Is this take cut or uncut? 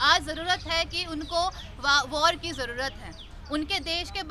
uncut